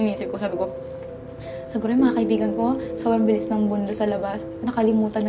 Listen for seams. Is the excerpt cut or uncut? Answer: uncut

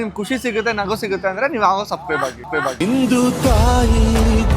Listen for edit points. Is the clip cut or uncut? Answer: cut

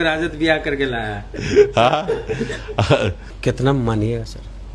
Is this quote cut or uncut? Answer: cut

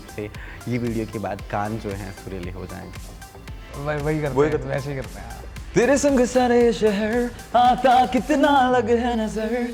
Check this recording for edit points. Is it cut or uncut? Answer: uncut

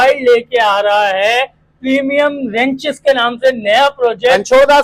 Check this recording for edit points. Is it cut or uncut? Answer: uncut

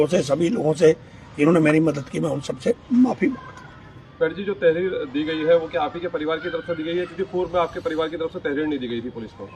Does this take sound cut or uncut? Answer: uncut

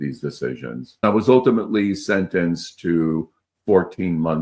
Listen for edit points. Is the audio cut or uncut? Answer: cut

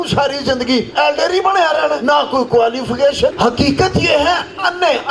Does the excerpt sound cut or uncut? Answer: cut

